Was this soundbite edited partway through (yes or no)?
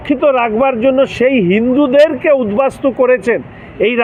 no